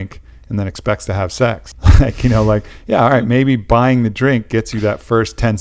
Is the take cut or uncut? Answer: cut